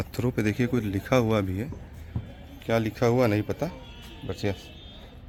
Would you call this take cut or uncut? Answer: uncut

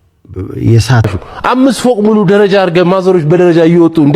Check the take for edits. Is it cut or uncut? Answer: cut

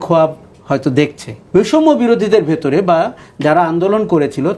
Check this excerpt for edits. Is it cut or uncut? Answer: cut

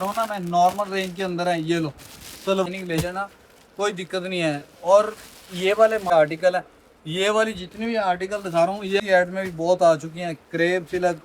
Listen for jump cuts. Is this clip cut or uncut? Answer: cut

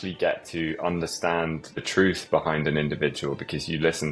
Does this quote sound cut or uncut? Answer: cut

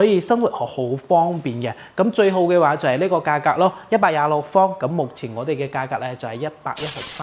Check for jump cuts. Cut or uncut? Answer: uncut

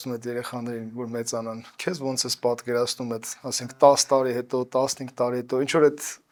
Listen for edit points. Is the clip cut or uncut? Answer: uncut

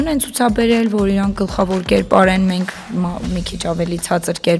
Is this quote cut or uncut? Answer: uncut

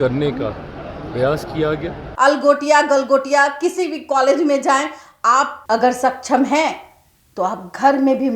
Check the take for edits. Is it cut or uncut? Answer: cut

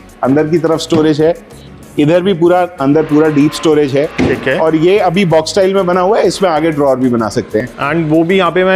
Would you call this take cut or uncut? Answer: uncut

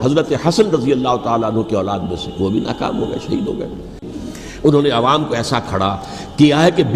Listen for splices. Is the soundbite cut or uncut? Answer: cut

